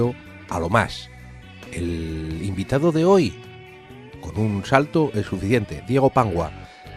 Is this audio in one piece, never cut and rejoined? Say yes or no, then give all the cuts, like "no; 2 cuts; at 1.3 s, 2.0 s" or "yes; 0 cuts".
no; 1 cut; at 5.4 s